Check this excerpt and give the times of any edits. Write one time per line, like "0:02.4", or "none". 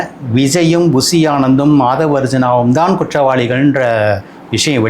none

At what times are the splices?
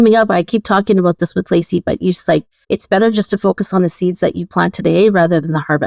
0:02.5

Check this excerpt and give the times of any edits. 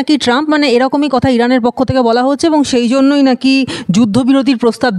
none

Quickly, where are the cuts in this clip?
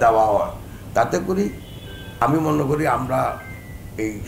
none

